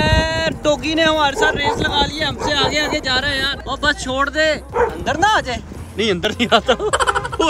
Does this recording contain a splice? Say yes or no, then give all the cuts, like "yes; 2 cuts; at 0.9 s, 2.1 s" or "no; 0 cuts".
no; 0 cuts